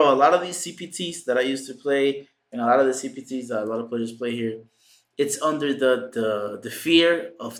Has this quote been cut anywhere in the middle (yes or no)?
no